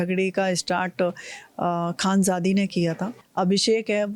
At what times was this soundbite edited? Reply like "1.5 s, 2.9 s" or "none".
3.2 s